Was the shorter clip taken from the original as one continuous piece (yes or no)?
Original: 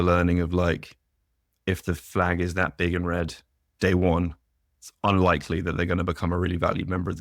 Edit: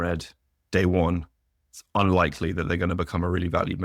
yes